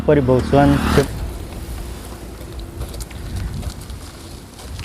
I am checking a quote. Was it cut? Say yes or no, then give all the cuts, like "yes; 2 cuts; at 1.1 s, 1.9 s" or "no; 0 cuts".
yes; 1 cut; at 1.0 s